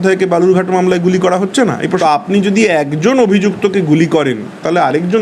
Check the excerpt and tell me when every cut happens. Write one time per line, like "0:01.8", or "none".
0:02.0